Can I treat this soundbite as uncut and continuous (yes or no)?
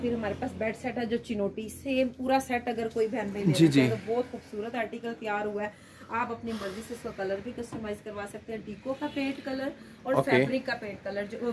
yes